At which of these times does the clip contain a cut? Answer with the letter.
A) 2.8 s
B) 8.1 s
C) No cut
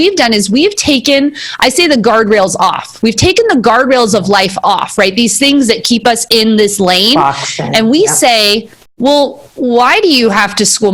C